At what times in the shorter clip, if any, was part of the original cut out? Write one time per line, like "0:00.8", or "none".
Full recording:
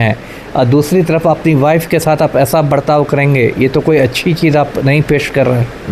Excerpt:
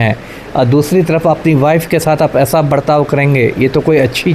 none